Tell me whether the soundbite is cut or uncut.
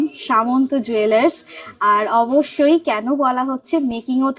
uncut